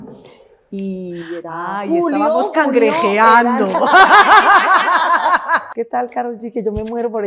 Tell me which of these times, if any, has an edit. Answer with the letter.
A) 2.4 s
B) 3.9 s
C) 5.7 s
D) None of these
C